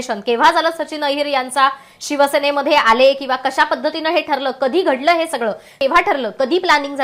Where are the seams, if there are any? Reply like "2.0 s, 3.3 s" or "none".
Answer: none